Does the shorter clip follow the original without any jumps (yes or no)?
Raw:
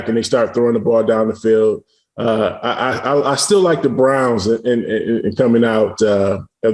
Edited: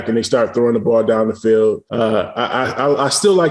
no